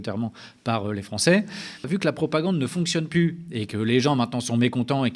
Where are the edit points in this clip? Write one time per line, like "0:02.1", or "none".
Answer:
0:01.9